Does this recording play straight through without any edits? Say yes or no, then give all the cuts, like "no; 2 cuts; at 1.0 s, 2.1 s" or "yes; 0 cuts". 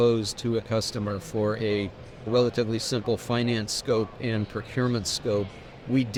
yes; 0 cuts